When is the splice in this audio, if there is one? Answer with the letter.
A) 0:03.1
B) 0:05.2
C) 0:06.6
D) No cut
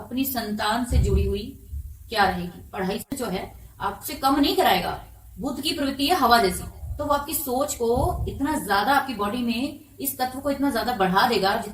A